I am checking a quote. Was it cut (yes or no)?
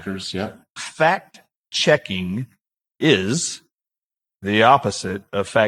no